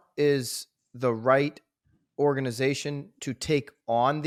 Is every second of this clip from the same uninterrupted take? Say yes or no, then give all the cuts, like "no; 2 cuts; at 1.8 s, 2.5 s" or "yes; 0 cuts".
yes; 0 cuts